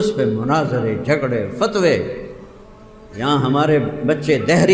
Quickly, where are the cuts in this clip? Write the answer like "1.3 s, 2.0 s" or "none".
none